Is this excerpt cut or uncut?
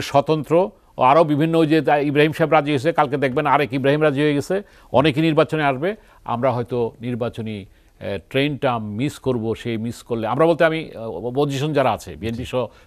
uncut